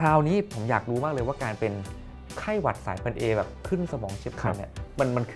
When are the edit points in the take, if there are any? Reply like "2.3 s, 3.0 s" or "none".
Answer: none